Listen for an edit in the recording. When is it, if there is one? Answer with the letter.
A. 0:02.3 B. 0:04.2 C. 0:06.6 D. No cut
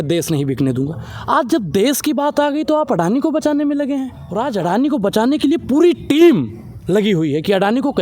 B